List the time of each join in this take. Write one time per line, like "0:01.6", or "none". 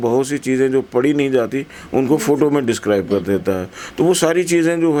none